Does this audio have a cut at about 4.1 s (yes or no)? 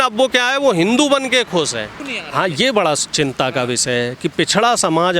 no